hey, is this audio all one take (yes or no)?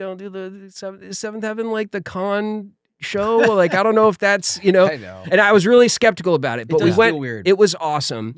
yes